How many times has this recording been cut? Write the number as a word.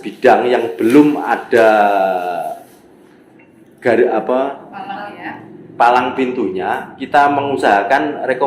zero